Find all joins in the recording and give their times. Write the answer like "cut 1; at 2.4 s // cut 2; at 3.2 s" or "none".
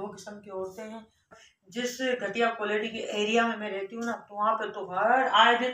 cut 1; at 1.3 s